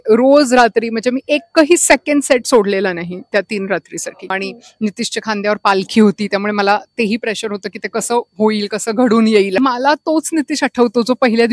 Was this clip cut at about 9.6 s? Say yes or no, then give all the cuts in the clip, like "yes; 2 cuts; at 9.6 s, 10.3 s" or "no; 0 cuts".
yes; 2 cuts; at 4.4 s, 9.6 s